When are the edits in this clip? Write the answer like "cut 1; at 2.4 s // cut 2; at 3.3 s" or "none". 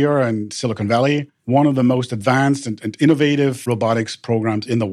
cut 1; at 3.7 s

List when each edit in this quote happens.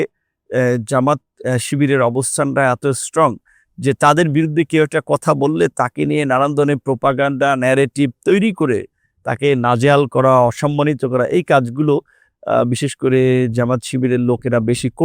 none

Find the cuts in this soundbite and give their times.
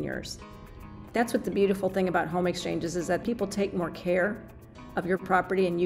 cut 1; at 0.9 s // cut 2; at 3.2 s

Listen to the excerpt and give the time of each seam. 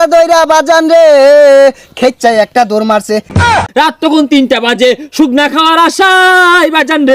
cut 1; at 3.5 s

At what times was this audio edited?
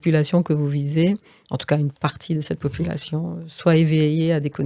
none

